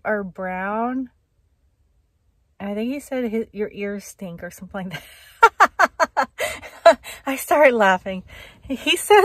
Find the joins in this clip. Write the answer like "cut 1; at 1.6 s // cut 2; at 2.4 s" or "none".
none